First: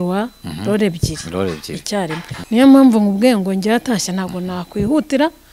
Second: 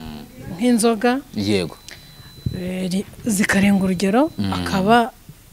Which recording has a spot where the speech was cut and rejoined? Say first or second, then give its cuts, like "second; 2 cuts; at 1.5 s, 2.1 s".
first; 1 cut; at 2.3 s